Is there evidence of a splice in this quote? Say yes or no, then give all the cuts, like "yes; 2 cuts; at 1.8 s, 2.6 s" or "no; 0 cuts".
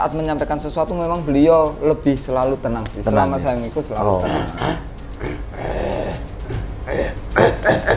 no; 0 cuts